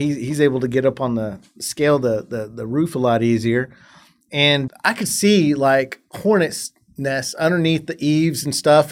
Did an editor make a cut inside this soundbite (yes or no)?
yes